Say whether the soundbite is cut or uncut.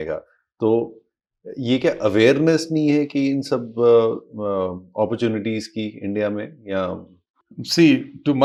uncut